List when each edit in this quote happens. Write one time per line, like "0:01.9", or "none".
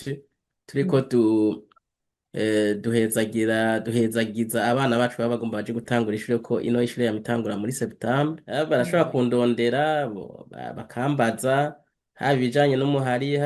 0:08.4

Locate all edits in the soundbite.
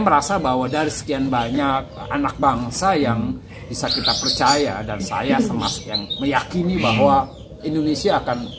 none

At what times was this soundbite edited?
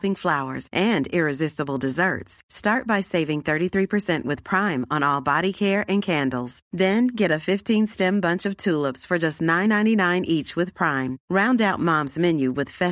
none

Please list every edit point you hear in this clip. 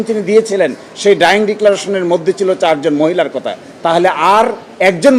none

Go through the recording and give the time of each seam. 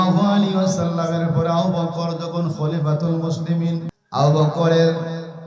0:03.9

